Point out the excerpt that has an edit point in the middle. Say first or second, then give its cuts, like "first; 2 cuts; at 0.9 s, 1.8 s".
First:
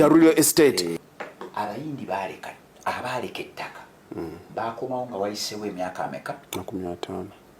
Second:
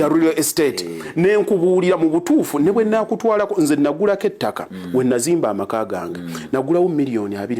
first; 1 cut; at 0.9 s